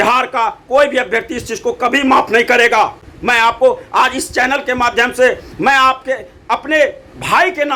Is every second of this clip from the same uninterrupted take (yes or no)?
yes